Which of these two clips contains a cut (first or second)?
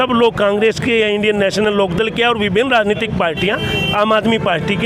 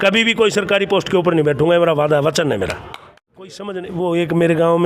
second